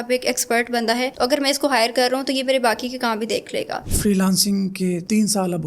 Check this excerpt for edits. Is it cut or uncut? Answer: cut